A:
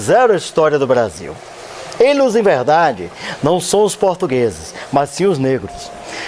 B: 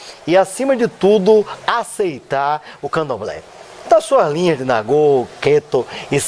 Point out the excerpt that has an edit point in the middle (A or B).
A